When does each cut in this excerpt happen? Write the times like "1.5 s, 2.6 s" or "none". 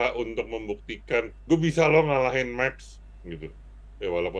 1.4 s